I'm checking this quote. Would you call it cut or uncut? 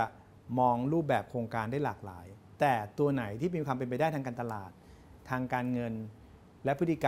uncut